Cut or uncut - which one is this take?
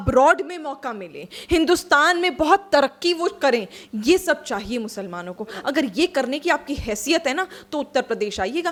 uncut